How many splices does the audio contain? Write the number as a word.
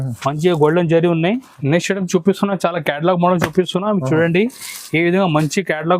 one